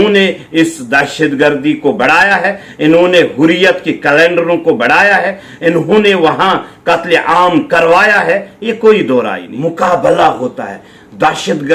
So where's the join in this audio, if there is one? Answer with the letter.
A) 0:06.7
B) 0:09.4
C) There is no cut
B